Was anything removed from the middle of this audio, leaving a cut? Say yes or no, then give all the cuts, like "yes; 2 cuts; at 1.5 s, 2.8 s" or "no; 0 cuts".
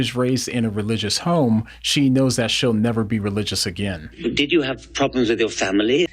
yes; 1 cut; at 4.0 s